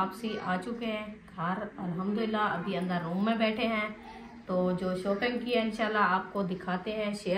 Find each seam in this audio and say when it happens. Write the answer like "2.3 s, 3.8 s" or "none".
none